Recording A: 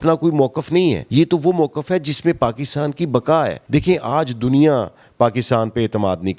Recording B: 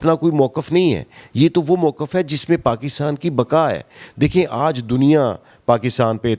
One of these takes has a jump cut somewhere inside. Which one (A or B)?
A